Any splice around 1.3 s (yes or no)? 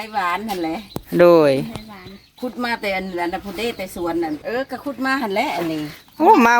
no